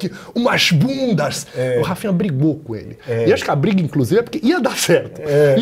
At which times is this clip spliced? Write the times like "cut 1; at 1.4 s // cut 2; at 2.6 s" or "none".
none